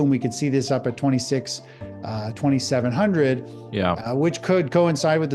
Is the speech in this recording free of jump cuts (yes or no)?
yes